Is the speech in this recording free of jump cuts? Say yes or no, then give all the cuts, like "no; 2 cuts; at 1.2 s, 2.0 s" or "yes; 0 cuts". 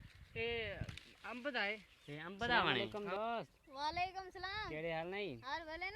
no; 1 cut; at 2.8 s